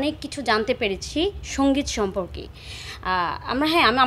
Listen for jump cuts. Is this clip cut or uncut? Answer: uncut